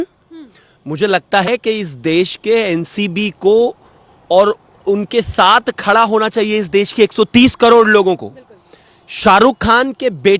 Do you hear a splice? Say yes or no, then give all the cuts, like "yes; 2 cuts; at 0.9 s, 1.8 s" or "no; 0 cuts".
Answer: yes; 1 cut; at 1.5 s